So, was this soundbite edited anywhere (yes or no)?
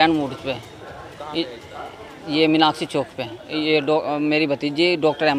no